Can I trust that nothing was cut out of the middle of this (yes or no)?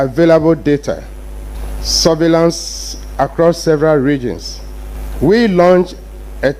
yes